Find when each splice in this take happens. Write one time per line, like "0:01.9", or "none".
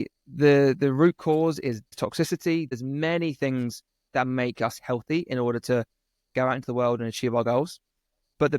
0:01.9
0:02.7